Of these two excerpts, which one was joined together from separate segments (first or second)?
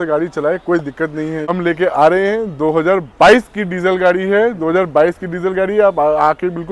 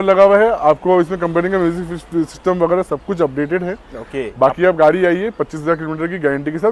first